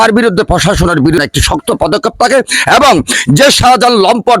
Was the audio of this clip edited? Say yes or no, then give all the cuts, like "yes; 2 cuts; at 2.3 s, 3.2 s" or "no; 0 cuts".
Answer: yes; 1 cut; at 1.2 s